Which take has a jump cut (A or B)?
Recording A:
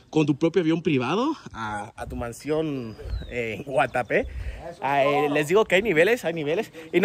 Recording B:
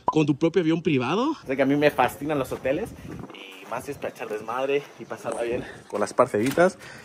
B